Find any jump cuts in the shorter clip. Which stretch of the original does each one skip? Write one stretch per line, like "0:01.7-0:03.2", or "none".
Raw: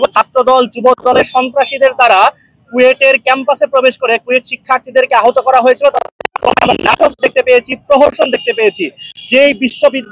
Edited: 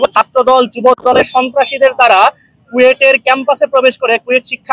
none